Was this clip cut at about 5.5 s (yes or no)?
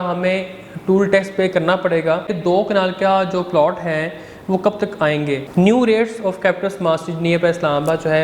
yes